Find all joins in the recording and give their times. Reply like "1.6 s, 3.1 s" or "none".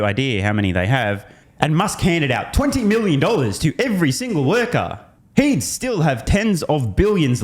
1.4 s